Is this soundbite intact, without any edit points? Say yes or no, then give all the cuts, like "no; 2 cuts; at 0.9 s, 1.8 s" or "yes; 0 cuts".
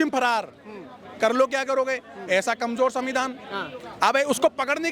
yes; 0 cuts